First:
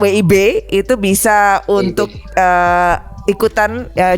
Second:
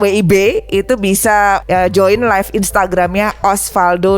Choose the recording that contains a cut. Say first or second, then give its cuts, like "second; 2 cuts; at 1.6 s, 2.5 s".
second; 1 cut; at 1.6 s